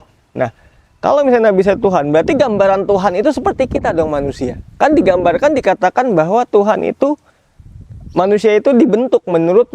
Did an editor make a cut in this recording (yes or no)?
no